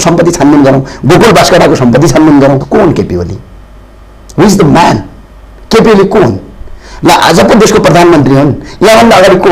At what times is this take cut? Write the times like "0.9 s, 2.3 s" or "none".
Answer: 2.6 s

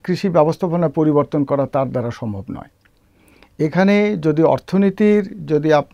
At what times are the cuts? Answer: none

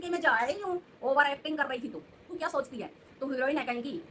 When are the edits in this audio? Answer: 2.2 s

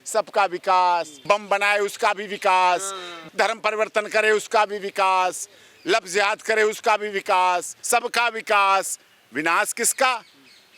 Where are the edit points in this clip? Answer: 1.1 s, 3.2 s, 7.7 s

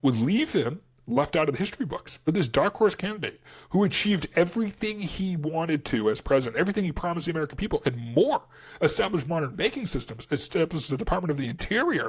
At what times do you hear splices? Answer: 2.1 s

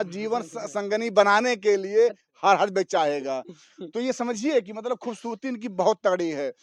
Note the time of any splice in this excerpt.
none

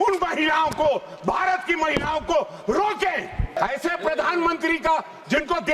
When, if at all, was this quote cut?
3.6 s

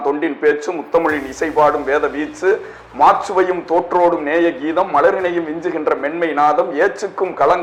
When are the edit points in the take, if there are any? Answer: none

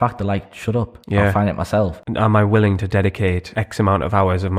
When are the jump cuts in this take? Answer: 1.0 s, 2.0 s, 3.5 s

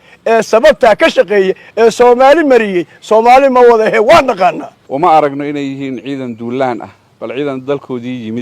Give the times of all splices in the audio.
4.7 s

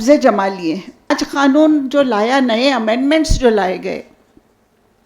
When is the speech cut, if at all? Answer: 1.1 s

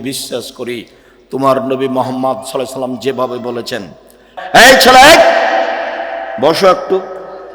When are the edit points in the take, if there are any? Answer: 4.4 s

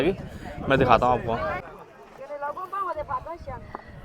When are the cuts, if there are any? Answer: 1.7 s

